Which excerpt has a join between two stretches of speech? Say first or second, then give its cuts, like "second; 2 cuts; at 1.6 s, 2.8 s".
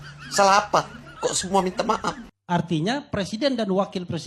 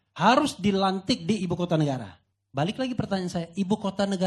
first; 1 cut; at 2.2 s